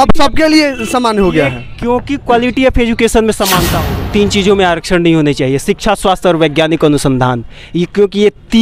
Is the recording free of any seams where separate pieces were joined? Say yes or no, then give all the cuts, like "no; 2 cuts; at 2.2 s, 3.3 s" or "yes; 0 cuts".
no; 1 cut; at 3.7 s